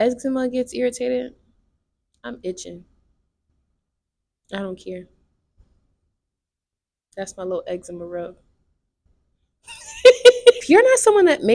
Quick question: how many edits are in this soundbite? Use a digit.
1